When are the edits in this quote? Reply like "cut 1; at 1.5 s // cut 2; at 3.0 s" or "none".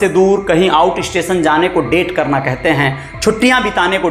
none